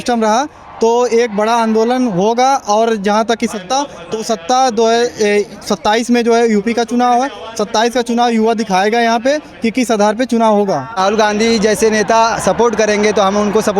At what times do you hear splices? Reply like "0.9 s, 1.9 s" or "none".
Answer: 11.0 s